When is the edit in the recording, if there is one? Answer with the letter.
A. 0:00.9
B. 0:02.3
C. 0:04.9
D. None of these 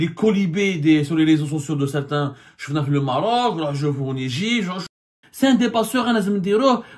C